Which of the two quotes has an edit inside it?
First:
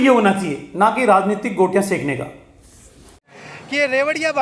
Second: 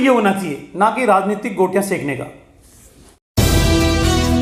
first; 1 cut; at 3.3 s

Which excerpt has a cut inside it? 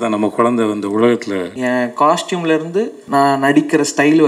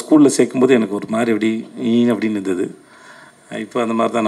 first; 2 cuts; at 1.5 s, 3.0 s

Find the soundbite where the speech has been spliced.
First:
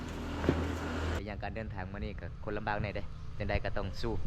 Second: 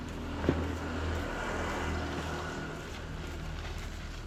first; 1 cut; at 1.2 s

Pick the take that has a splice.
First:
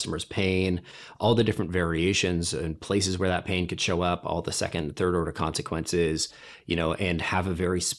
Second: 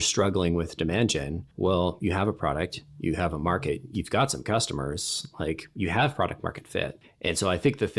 second; 2 cuts; at 1.4 s, 7.0 s

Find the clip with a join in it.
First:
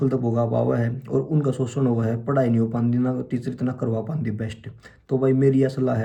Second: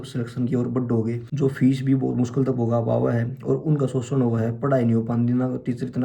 second; 1 cut; at 1.3 s

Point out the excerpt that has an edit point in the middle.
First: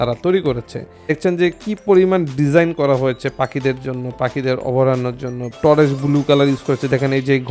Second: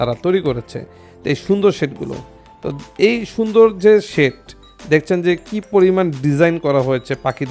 first; 2 cuts; at 1.2 s, 5.6 s

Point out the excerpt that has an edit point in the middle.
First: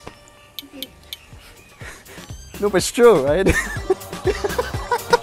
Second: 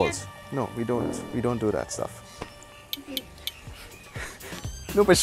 first; 1 cut; at 4.1 s

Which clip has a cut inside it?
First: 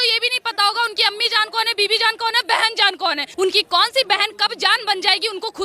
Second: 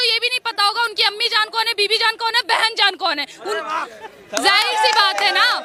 first; 1 cut; at 3.3 s

